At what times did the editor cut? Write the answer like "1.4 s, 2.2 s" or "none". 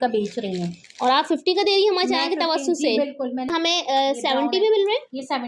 3.5 s